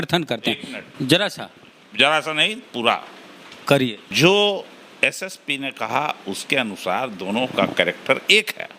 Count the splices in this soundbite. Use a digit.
1